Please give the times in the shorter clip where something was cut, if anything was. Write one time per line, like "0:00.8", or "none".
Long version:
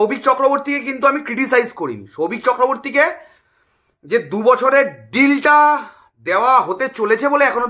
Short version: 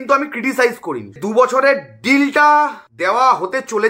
0:01.2
0:02.9